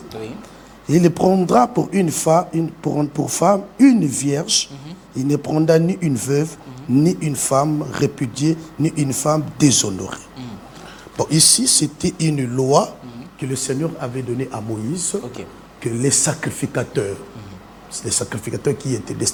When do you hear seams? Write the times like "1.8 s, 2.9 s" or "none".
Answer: none